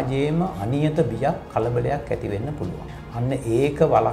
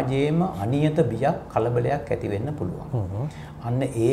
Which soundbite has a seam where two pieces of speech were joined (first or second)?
first